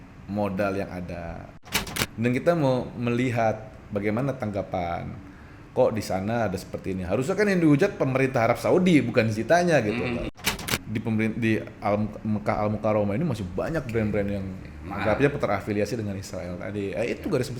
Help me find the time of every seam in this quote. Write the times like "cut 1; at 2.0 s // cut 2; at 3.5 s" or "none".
cut 1; at 1.6 s // cut 2; at 10.3 s

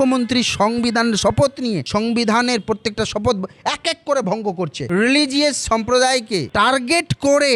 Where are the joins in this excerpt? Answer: cut 1; at 4.9 s

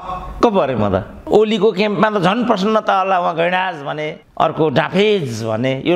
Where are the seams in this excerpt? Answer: cut 1; at 1.1 s

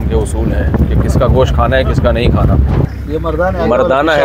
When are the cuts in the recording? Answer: cut 1; at 2.9 s

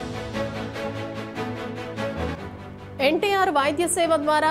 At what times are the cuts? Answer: none

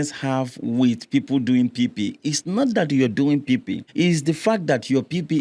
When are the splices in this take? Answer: cut 1; at 3.8 s

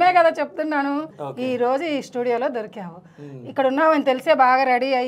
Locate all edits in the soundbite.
cut 1; at 1.1 s

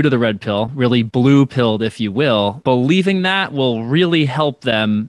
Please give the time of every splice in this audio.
cut 1; at 2.6 s

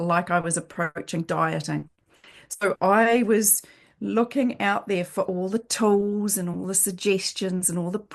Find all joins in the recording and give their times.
none

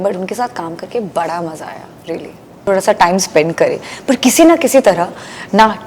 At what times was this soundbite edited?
cut 1; at 2.6 s

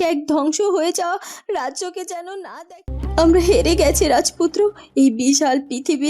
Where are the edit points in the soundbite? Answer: cut 1; at 2.8 s

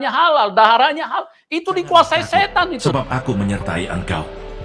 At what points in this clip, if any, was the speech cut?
cut 1; at 2.9 s

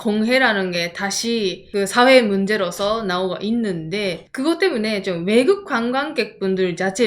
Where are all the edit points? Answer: cut 1; at 1.6 s // cut 2; at 4.2 s

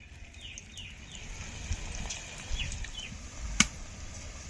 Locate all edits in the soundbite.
cut 1; at 1.2 s // cut 2; at 3.0 s

